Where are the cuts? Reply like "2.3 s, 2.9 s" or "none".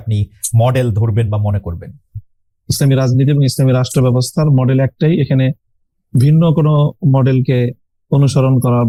none